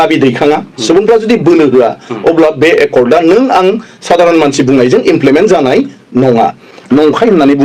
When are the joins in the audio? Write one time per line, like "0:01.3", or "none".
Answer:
none